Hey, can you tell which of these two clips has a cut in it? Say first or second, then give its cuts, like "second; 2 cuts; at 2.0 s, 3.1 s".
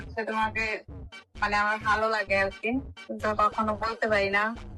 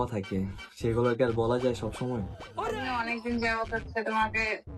second; 1 cut; at 2.7 s